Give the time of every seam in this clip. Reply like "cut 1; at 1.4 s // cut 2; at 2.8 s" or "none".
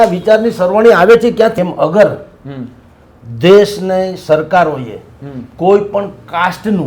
cut 1; at 1.6 s